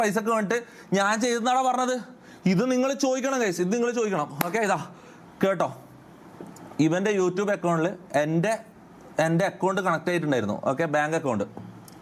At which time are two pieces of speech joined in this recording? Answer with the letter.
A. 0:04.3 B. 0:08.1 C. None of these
C